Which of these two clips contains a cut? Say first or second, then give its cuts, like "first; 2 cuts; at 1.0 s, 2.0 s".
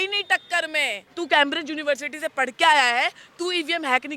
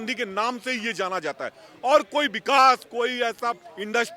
first; 1 cut; at 1.0 s